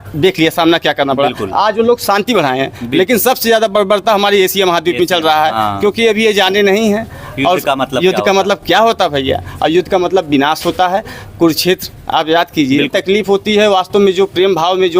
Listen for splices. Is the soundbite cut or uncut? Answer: cut